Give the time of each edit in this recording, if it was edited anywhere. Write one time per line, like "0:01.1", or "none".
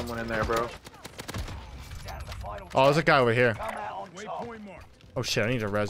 none